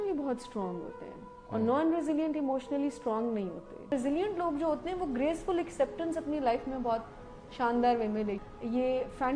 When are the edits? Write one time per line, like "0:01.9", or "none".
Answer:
0:03.8
0:08.5